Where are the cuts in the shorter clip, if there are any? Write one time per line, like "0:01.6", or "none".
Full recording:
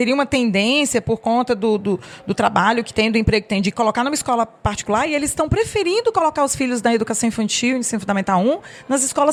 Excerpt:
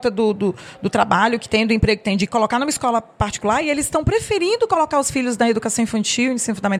none